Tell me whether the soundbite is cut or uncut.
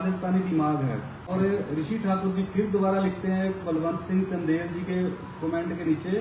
cut